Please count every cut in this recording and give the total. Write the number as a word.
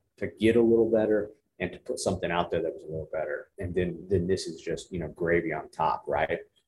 one